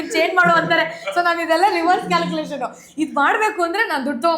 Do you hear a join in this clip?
no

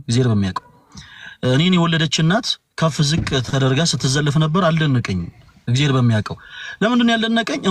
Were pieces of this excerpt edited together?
no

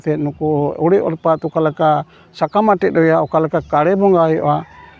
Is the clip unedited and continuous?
yes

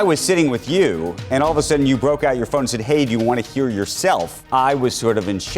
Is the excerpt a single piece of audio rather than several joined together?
no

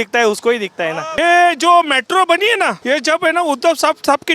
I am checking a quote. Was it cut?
yes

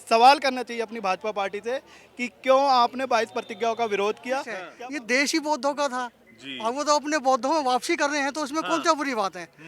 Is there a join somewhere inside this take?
yes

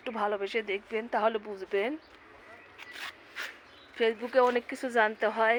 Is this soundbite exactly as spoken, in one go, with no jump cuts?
yes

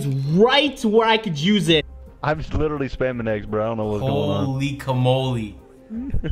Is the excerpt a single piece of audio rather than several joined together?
no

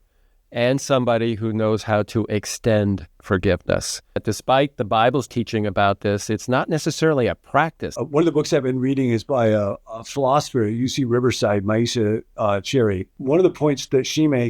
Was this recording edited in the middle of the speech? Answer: yes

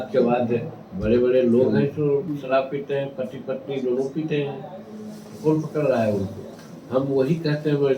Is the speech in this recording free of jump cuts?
yes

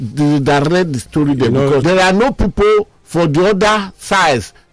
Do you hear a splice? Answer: yes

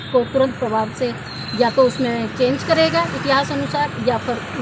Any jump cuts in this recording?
no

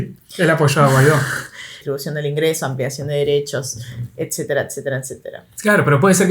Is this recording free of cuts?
no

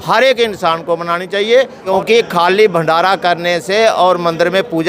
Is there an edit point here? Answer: yes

